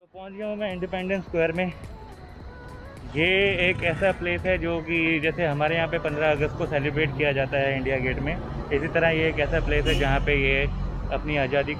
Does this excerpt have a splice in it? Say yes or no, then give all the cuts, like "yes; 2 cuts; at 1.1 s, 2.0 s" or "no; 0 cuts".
no; 0 cuts